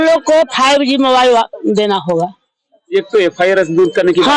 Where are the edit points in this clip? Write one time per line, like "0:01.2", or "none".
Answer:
none